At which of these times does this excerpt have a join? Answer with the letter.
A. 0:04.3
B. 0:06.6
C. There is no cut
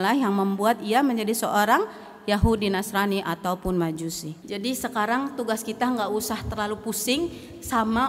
A